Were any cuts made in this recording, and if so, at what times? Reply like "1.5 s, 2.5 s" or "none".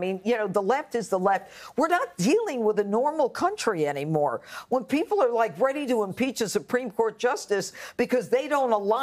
4.8 s